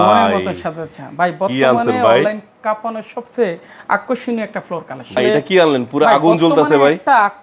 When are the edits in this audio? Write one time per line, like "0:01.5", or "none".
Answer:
0:05.2